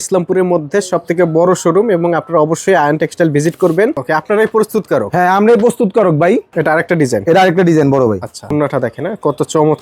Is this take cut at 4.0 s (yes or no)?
yes